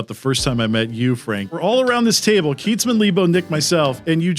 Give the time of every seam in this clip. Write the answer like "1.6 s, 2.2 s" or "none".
1.6 s